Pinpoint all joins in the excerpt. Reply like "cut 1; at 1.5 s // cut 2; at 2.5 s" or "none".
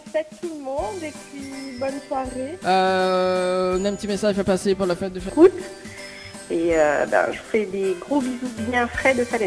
cut 1; at 5.3 s